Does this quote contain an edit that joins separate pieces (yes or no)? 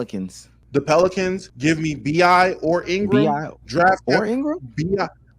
yes